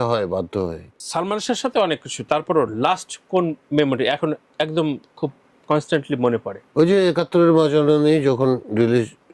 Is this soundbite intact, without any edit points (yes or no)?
no